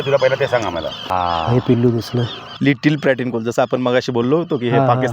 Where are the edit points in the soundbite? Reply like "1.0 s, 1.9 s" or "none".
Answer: 1.0 s, 2.4 s